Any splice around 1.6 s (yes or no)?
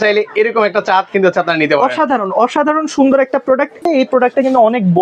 no